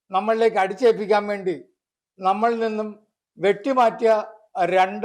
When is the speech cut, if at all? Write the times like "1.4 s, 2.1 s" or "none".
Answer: none